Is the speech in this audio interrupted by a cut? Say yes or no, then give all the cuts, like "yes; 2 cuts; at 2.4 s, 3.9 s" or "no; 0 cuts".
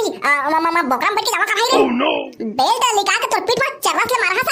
no; 0 cuts